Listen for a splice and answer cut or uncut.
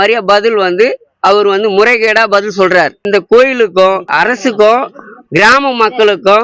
cut